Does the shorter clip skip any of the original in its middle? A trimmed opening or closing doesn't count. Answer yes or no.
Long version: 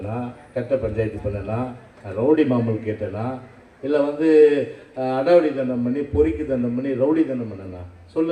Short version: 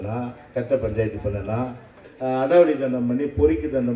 yes